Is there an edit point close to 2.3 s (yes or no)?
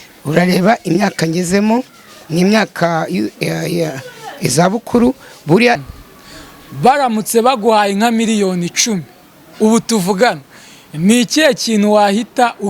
no